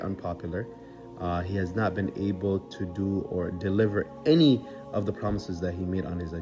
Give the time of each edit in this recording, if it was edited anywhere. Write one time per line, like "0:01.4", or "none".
none